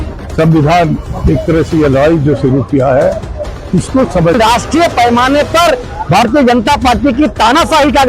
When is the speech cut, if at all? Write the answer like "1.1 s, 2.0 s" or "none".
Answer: 4.3 s